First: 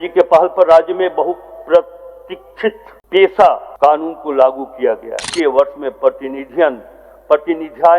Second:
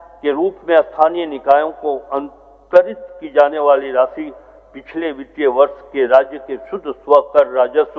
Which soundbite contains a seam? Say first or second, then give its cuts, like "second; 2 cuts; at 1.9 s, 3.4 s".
first; 3 cuts; at 2.9 s, 3.7 s, 5.3 s